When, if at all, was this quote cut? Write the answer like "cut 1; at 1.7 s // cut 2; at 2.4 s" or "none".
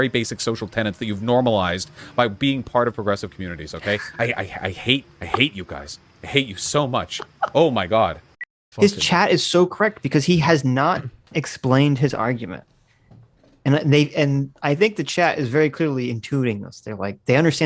cut 1; at 8.5 s